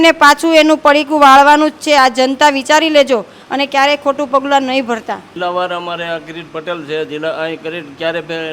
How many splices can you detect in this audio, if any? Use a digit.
1